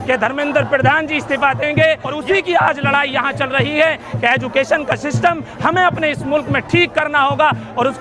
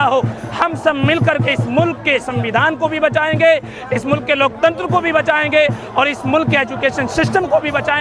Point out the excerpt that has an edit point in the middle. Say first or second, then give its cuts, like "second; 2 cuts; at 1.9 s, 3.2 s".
first; 1 cut; at 2.1 s